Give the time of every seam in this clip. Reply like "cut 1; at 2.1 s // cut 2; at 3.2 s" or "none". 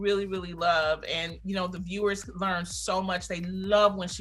none